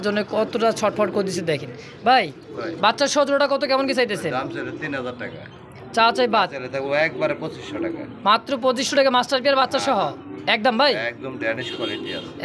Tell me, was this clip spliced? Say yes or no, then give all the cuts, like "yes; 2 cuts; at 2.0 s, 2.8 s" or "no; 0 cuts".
no; 0 cuts